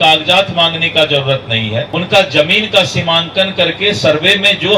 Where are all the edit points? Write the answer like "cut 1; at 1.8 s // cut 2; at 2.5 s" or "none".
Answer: cut 1; at 1.9 s